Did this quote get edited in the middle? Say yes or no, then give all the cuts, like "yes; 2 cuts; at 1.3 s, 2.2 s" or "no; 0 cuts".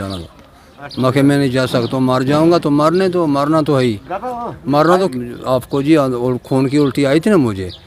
yes; 1 cut; at 5.1 s